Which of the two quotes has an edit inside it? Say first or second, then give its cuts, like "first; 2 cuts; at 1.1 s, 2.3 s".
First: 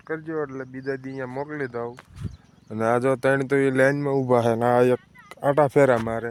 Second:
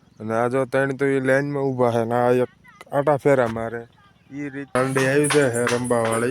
second; 1 cut; at 4.8 s